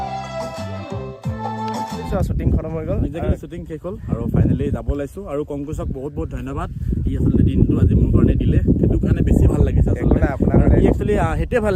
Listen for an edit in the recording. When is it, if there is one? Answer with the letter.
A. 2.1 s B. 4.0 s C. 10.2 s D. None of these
A